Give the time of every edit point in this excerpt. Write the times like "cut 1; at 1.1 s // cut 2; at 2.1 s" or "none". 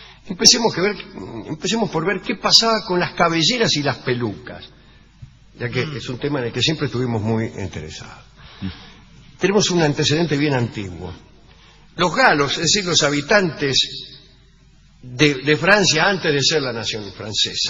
cut 1; at 4.2 s